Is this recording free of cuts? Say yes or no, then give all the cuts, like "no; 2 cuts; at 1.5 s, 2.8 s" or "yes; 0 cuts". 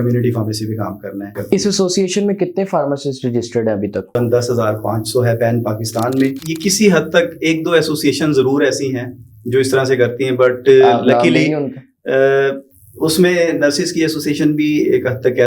no; 3 cuts; at 1.3 s, 4.1 s, 6.4 s